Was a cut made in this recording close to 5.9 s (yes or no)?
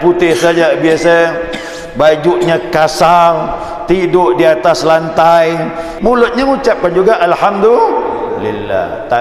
yes